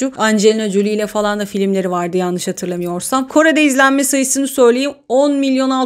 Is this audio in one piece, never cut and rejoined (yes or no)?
yes